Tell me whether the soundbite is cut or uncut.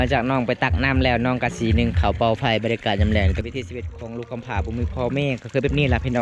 cut